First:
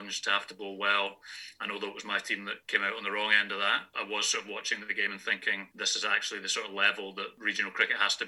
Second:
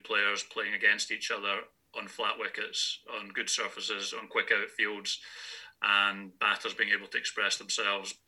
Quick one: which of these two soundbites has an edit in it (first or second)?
first